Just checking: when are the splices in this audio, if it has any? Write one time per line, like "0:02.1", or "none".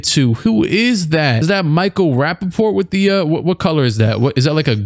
none